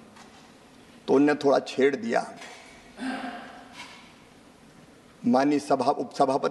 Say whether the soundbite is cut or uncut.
uncut